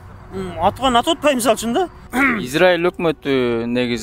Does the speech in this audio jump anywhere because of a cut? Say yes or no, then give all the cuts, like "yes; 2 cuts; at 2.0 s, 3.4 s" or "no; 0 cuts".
yes; 1 cut; at 2.0 s